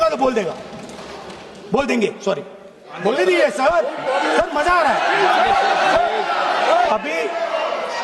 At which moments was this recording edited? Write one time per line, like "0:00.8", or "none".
0:02.9
0:06.9